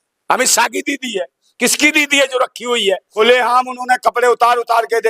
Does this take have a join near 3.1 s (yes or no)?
yes